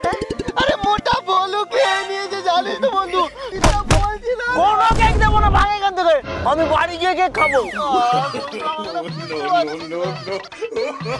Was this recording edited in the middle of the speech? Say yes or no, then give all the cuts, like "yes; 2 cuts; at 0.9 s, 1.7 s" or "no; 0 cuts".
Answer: yes; 1 cut; at 3.5 s